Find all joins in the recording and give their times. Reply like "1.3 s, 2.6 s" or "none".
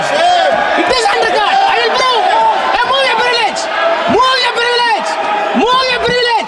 none